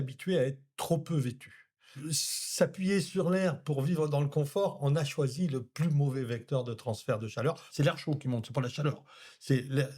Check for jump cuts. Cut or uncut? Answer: cut